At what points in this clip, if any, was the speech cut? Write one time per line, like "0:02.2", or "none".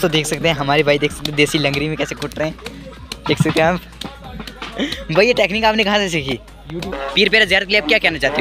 0:07.0